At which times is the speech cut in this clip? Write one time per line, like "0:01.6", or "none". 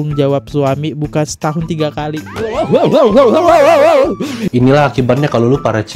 0:04.4